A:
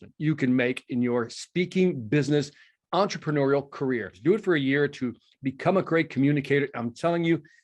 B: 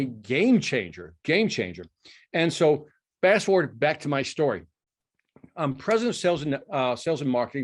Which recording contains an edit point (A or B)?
A